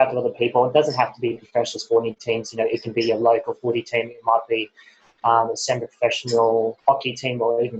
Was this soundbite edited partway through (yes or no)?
yes